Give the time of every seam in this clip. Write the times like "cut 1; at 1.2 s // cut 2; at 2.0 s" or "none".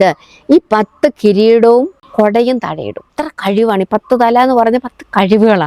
cut 1; at 3.1 s